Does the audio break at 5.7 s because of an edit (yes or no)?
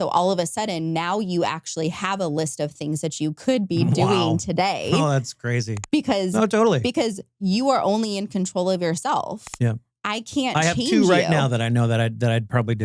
yes